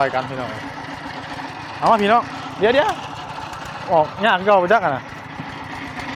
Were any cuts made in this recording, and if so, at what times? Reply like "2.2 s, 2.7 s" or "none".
none